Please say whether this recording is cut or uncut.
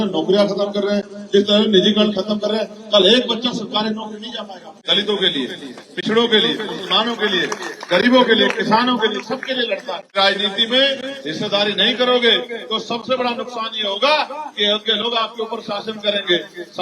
cut